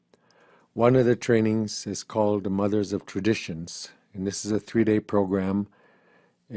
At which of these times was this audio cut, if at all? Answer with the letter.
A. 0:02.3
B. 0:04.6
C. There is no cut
A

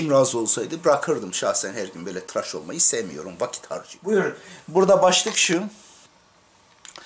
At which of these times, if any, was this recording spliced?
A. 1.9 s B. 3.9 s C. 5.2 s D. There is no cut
B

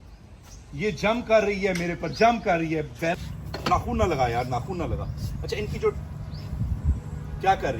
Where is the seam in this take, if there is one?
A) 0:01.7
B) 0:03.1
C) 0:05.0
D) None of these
B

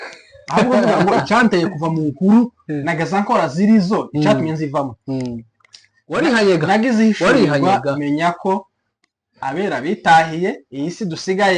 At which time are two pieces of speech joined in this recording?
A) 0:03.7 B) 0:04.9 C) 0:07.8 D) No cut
D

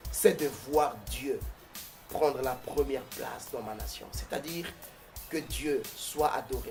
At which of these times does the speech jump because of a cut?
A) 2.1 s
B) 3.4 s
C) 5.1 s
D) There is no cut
D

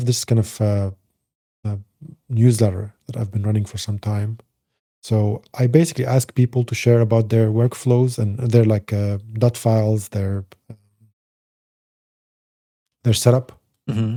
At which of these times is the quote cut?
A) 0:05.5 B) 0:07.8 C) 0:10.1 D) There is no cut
D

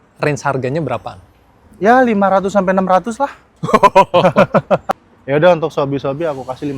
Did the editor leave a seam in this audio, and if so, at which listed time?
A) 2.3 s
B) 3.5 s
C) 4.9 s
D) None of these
C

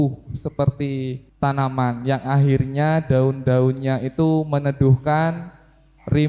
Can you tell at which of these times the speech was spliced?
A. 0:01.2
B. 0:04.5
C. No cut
A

